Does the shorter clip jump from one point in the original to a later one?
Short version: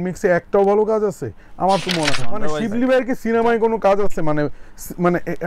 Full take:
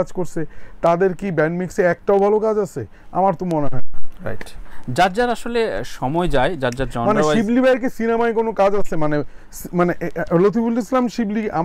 yes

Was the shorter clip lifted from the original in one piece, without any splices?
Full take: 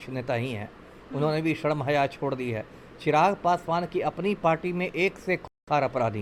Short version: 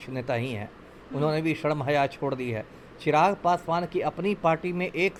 yes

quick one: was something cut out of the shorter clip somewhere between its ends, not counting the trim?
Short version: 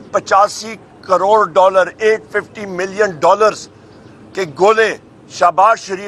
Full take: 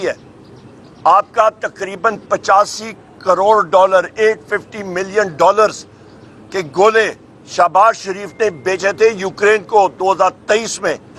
no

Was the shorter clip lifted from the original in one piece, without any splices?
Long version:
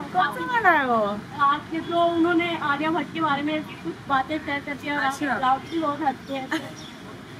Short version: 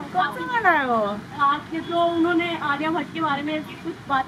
yes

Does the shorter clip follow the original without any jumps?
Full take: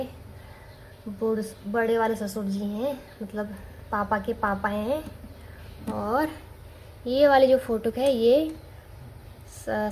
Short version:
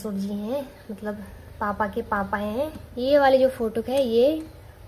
no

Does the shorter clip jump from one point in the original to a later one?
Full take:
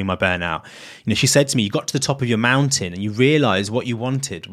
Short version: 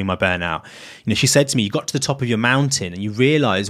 no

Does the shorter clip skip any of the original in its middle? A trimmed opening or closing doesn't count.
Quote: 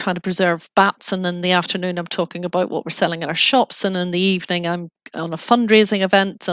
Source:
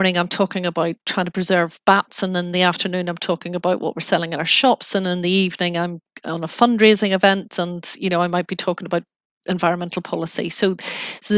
no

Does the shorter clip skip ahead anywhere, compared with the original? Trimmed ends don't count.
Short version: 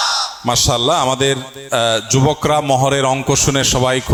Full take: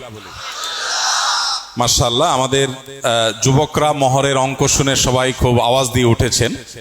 no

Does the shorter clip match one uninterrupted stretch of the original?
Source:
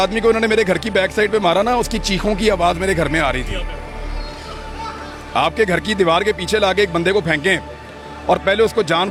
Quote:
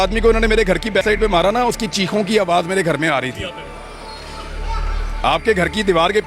no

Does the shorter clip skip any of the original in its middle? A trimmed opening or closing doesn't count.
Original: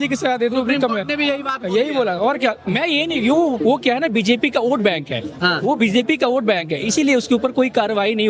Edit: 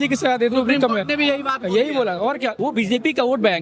yes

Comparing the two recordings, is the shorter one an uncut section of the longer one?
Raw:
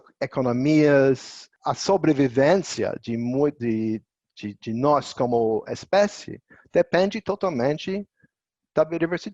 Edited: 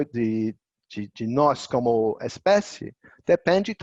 yes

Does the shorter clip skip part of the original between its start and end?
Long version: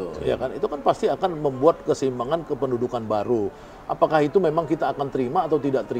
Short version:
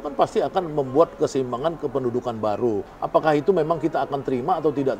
yes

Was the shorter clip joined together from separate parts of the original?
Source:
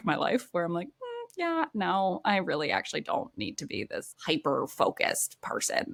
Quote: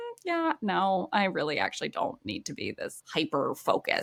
no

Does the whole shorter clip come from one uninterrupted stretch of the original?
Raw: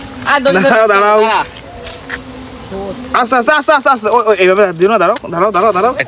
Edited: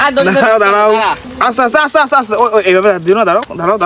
no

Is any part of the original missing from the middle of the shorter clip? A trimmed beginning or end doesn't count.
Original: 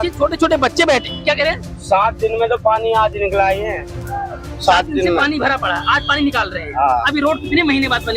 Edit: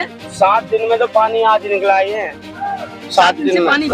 no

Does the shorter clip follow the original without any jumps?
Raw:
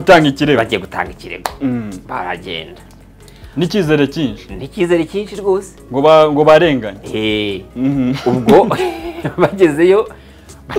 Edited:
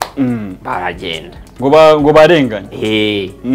no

